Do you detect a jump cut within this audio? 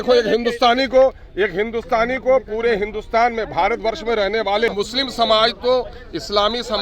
yes; 1 cut; at 4.7 s

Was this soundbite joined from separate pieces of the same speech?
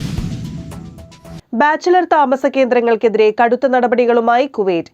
yes; 1 cut; at 1.3 s

